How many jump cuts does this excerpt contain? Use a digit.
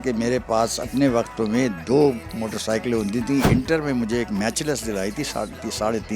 1